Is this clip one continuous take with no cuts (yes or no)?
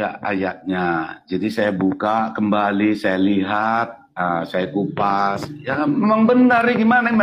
yes